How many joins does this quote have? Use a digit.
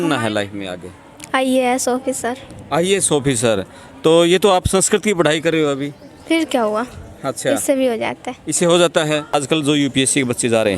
1